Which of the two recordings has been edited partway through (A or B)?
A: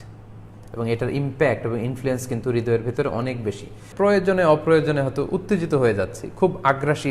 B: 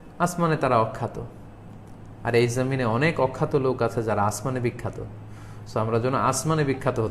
A